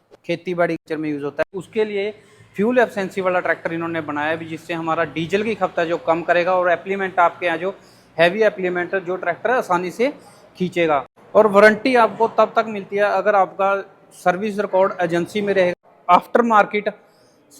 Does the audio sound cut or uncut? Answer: cut